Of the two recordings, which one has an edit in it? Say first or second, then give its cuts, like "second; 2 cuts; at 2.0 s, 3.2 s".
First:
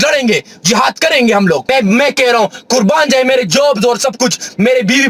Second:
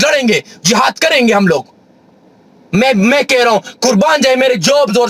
first; 1 cut; at 1.7 s